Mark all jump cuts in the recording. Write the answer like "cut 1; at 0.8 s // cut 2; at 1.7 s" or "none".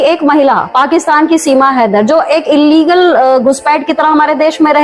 none